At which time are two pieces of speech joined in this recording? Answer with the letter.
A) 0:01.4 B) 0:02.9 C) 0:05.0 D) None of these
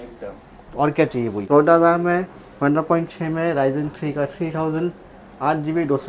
A